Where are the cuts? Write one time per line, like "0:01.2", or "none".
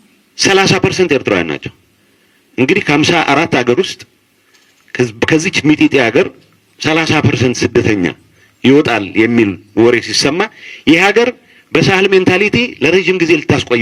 none